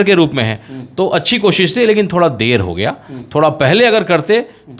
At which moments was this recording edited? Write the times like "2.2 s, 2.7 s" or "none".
none